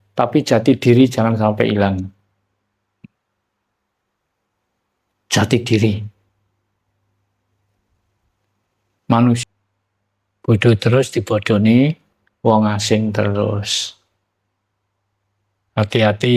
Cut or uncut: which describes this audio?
cut